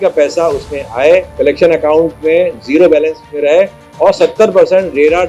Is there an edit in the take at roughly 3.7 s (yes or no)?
no